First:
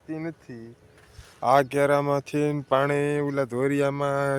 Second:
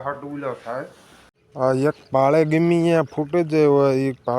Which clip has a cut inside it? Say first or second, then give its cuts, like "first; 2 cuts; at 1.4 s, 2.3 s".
second; 1 cut; at 1.4 s